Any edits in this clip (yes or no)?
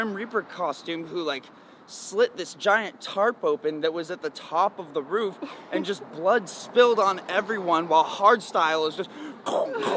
no